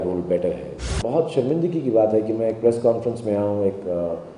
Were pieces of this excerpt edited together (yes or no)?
yes